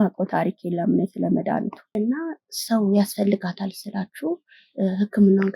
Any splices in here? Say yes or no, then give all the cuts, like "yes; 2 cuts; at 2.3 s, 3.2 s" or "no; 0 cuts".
yes; 1 cut; at 1.8 s